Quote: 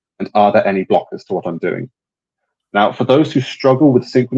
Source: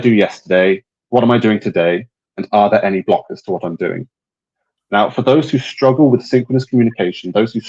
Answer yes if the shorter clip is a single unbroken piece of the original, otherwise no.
yes